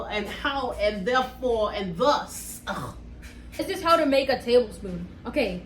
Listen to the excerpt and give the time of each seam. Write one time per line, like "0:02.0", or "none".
0:03.6